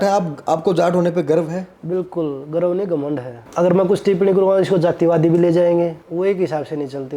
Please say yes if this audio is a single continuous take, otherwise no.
no